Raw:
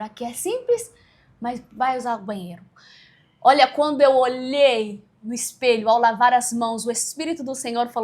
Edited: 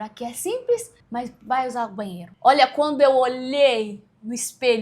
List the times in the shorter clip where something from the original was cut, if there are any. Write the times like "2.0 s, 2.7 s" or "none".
1.0 s, 2.2 s